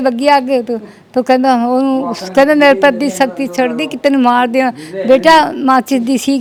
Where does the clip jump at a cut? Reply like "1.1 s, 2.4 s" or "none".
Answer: none